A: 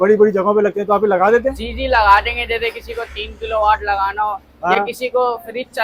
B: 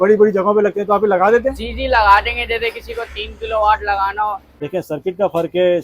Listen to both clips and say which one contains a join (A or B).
B